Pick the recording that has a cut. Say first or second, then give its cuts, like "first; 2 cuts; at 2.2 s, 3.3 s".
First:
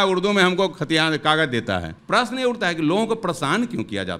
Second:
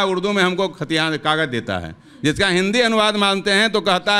first; 1 cut; at 1.9 s